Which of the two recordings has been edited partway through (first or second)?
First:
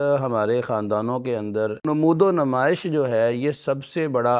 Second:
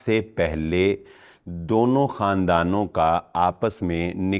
first